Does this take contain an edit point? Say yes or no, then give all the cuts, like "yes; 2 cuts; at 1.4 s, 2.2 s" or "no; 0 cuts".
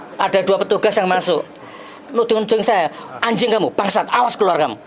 yes; 1 cut; at 2.1 s